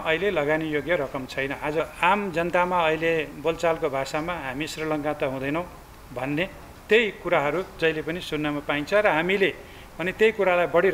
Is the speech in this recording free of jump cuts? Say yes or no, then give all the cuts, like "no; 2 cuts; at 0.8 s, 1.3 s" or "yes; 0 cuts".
no; 1 cut; at 1.8 s